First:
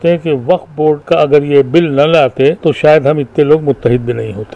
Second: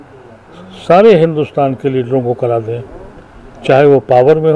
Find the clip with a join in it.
first; 2 cuts; at 1.0 s, 2.6 s

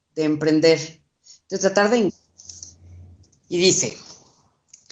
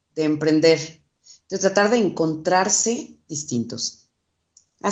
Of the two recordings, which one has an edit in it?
second; 1 cut; at 2.1 s

